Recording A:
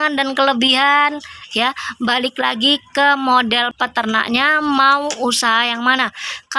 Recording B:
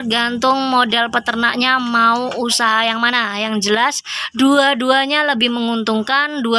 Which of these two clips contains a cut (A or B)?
A